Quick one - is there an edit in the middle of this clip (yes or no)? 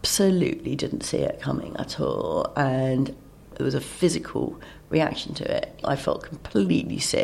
yes